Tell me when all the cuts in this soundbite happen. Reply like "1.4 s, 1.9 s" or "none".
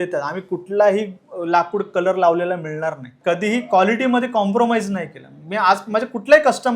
3.1 s